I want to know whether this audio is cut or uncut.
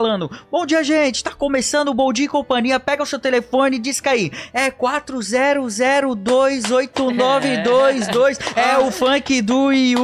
uncut